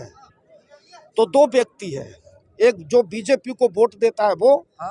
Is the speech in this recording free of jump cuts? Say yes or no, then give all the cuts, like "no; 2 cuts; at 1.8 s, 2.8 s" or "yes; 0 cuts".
yes; 0 cuts